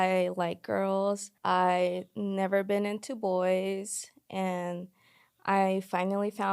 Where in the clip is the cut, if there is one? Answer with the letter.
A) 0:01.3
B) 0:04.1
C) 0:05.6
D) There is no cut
A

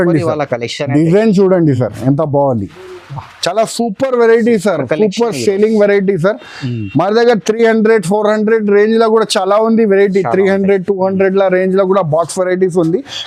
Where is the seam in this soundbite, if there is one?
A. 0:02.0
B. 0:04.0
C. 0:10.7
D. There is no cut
D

